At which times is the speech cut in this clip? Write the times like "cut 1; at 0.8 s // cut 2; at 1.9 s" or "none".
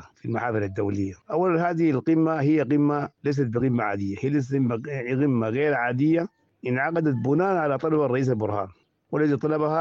none